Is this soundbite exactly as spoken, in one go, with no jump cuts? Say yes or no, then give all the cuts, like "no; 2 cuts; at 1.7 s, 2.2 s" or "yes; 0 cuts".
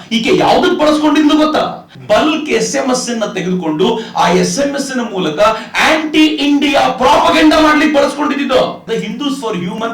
no; 2 cuts; at 1.9 s, 8.9 s